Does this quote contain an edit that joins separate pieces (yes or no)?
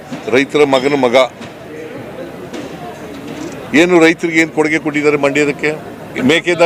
no